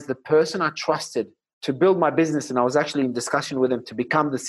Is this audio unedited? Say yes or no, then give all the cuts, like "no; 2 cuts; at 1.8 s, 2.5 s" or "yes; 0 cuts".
no; 1 cut; at 1.4 s